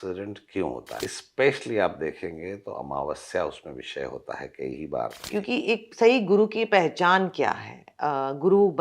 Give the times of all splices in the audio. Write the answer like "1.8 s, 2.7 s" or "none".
1.0 s, 5.2 s